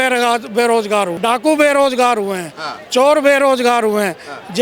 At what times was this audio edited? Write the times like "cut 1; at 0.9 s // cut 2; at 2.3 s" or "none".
cut 1; at 1.1 s